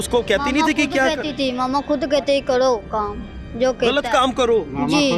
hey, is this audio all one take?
yes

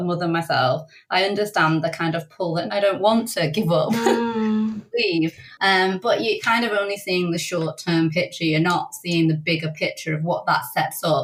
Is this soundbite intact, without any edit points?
yes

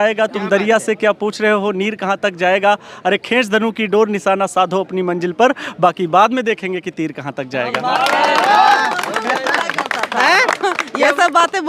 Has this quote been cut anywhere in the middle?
no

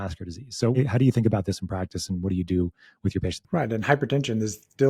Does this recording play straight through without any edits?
no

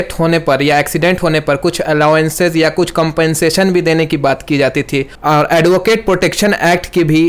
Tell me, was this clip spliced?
no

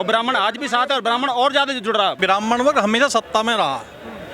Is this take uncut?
no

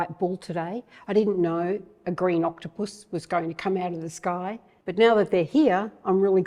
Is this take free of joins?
yes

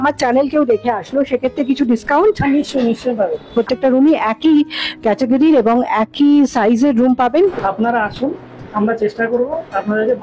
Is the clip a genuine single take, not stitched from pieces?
no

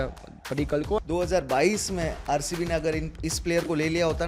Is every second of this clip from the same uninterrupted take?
no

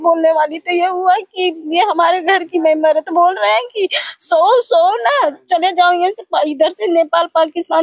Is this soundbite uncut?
yes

